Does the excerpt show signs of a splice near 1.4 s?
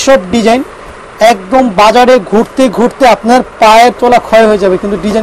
no; 0 cuts

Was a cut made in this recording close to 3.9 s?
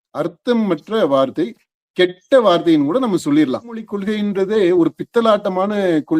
yes; 1 cut; at 3.9 s

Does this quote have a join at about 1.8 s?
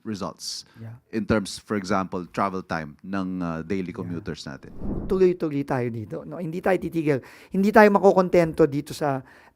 no; 1 cut; at 4.9 s

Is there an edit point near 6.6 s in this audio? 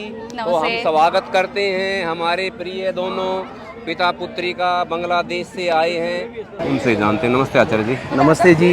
yes; 1 cut; at 6.6 s

